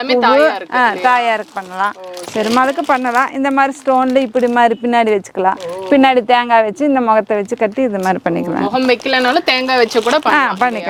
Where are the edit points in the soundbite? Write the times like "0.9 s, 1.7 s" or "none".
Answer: none